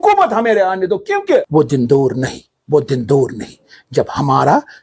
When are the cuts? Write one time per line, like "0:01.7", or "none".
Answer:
0:01.6